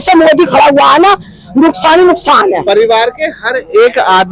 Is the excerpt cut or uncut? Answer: uncut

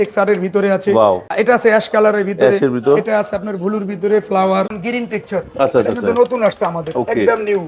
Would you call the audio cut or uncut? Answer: cut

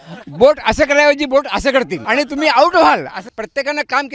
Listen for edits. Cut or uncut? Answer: cut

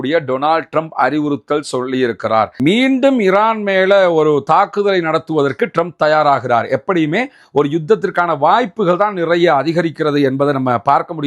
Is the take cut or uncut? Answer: cut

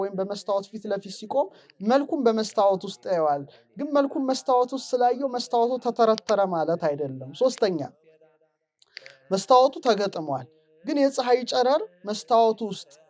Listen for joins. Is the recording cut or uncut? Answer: uncut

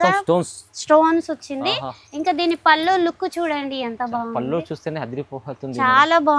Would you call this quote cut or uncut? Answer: uncut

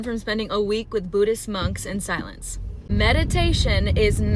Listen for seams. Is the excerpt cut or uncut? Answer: uncut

